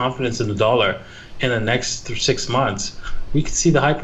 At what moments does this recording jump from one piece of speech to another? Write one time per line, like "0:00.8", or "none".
none